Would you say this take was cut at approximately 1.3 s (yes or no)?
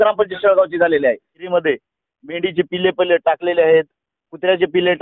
yes